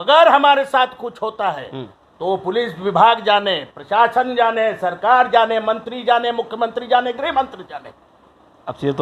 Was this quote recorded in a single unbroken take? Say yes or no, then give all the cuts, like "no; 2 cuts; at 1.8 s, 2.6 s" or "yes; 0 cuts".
yes; 0 cuts